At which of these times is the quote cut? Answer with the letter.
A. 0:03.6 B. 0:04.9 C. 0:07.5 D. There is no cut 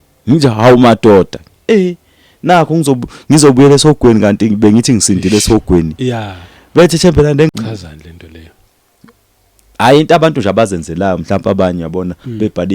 C